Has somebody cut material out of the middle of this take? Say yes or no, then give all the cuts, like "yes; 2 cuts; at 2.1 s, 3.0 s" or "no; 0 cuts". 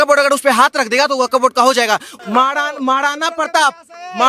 yes; 1 cut; at 2.1 s